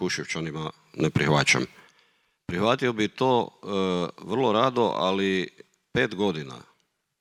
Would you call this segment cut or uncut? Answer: uncut